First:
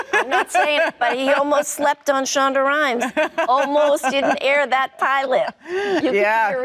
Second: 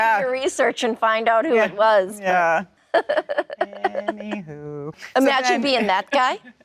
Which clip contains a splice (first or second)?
second